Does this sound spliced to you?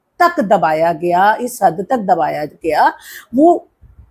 no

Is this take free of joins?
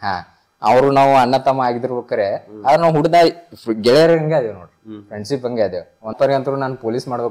no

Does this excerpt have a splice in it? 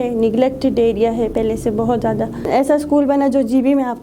yes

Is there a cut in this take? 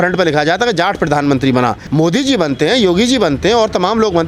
yes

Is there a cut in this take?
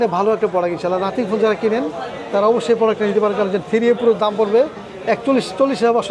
no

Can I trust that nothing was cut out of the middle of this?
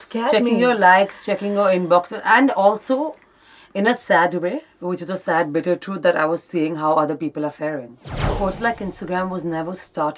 no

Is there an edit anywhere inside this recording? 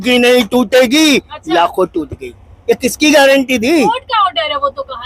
no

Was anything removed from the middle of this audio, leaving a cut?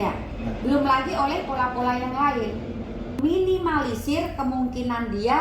yes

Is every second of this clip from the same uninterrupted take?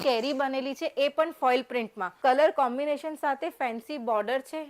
no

